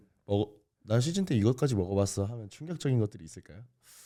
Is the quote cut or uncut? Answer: uncut